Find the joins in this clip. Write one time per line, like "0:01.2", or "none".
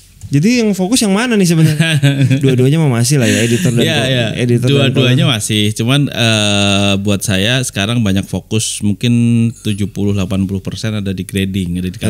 0:01.7